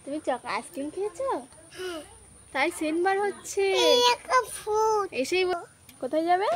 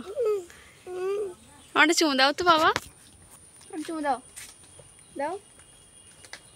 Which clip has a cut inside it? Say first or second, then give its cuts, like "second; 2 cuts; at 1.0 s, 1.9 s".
first; 1 cut; at 5.5 s